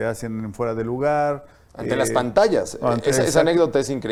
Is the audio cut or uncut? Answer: uncut